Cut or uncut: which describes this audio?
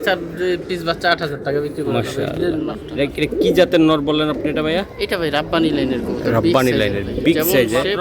cut